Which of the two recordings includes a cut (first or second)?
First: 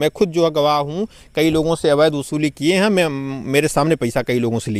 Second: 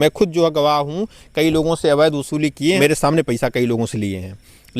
second